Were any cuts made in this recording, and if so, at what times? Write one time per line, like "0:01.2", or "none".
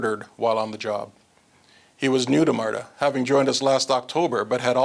none